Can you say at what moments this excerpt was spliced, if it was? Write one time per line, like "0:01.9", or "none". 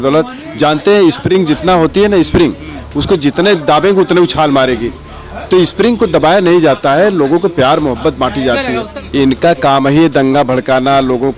0:09.0